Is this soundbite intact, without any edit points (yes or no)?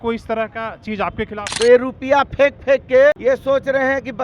no